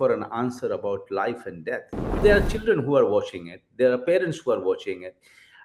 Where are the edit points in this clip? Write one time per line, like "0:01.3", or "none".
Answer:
0:02.2

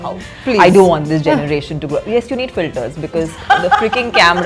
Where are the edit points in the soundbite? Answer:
none

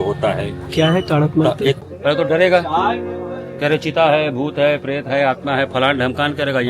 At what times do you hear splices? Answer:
0:01.8

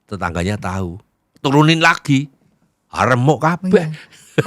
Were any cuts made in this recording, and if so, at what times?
none

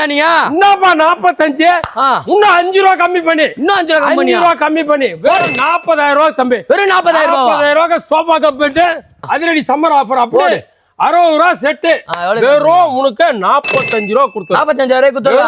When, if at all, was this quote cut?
0:09.2

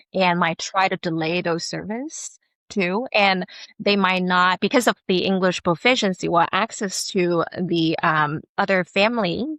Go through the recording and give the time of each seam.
none

